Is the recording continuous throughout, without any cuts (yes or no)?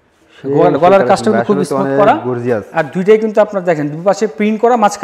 yes